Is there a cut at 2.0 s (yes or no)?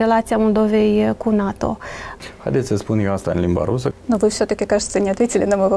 yes